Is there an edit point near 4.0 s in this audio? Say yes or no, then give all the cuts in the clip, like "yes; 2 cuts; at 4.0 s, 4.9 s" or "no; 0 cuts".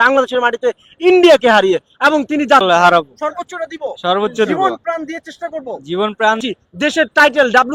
no; 2 cuts; at 2.6 s, 6.4 s